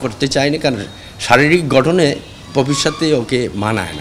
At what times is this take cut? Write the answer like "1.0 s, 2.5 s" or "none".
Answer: none